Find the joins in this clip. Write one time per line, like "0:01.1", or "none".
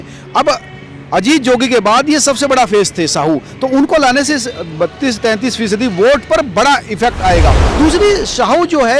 0:07.6